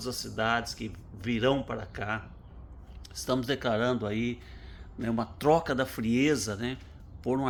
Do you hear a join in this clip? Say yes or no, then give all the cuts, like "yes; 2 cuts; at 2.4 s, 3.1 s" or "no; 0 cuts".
no; 0 cuts